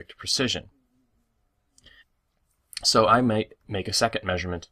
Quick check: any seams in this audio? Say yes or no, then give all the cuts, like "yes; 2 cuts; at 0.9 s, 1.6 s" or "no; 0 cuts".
no; 0 cuts